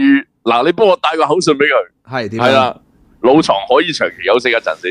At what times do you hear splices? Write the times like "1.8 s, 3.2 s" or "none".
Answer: none